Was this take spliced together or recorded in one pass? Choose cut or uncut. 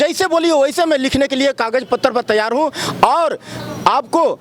uncut